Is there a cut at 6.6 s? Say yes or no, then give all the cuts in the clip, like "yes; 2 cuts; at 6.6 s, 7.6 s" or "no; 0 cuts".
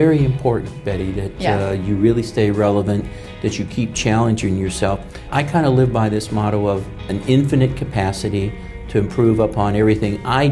no; 1 cut; at 5.2 s